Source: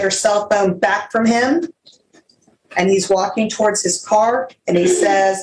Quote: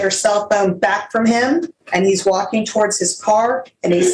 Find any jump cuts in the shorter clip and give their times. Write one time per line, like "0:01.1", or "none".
0:01.8